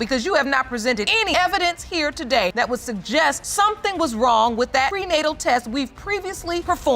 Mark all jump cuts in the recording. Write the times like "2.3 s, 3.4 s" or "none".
1.1 s